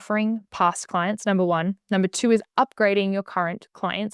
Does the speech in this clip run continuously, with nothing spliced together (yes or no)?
yes